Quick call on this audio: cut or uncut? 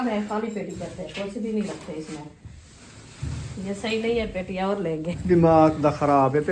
cut